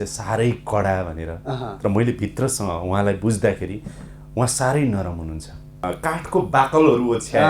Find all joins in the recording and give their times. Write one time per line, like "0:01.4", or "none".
0:05.9